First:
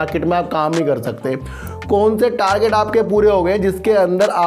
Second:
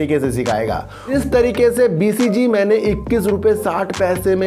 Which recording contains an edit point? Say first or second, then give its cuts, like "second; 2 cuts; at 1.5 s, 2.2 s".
second; 1 cut; at 1.1 s